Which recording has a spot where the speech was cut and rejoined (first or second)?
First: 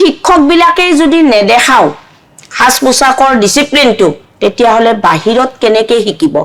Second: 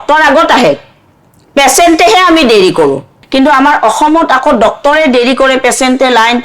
second